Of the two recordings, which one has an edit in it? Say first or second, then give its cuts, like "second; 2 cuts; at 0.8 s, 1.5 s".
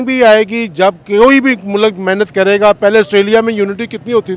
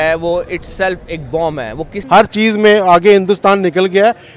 second; 1 cut; at 2.0 s